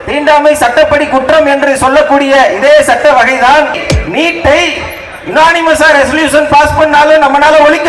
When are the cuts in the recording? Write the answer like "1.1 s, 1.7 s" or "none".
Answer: 3.8 s